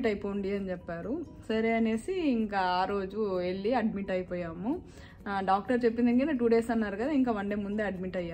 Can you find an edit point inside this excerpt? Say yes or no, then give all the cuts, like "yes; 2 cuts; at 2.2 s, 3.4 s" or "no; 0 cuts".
no; 0 cuts